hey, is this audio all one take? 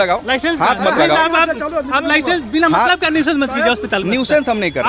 yes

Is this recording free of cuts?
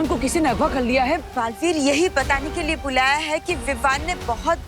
no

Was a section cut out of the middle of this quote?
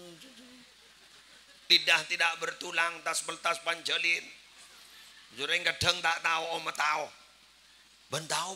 yes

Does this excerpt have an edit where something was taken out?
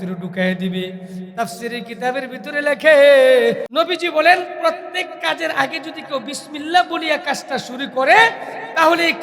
yes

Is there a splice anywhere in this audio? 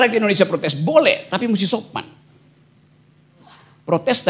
no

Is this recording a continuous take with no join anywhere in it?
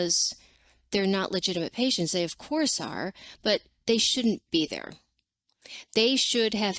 yes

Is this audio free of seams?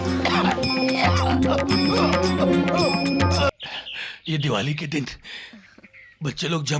no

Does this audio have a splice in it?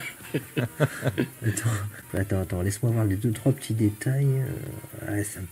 no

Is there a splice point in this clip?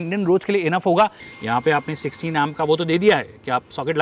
yes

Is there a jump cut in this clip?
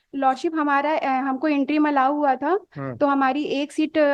no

